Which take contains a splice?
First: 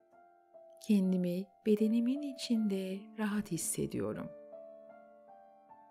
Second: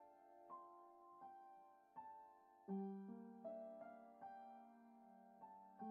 first; 2 cuts; at 0.8 s, 4.3 s

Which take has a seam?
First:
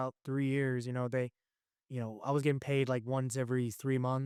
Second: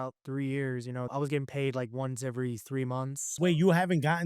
second; 2 cuts; at 1.1 s, 3.5 s

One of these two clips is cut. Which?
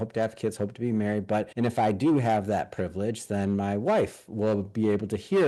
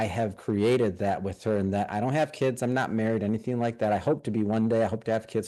first; 1 cut; at 1.5 s

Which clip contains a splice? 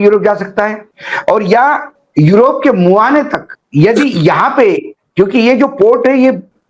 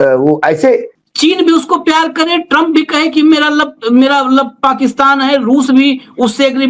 second; 1 cut; at 1.0 s

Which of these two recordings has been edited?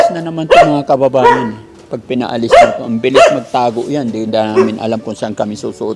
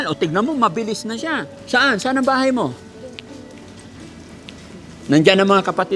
second; 1 cut; at 1.5 s

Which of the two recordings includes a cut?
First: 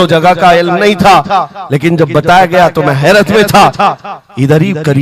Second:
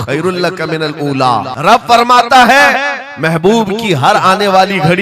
second; 1 cut; at 1.5 s

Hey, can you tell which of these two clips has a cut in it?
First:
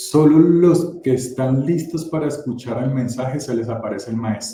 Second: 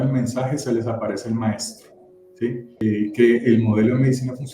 second; 1 cut; at 2.7 s

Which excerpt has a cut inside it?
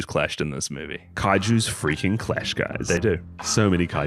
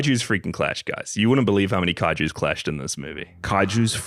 first; 1 cut; at 3.0 s

